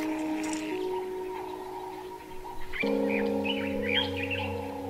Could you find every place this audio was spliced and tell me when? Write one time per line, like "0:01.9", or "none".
0:03.0